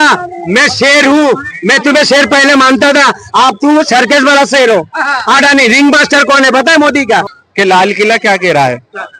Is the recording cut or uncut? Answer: cut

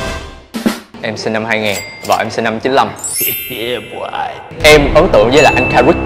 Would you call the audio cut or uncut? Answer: cut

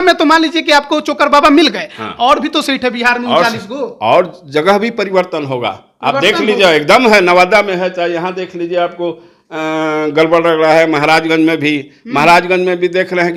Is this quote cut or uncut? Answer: uncut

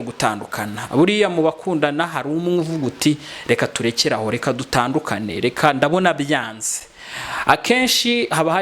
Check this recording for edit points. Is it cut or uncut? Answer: uncut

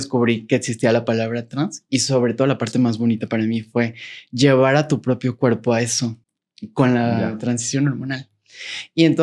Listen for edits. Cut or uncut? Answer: uncut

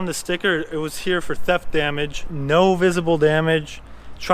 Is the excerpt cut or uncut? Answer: cut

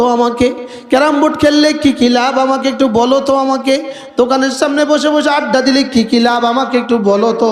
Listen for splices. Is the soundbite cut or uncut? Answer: uncut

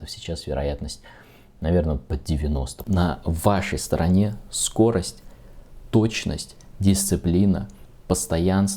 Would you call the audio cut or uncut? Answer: cut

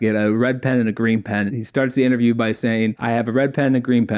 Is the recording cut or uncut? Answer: cut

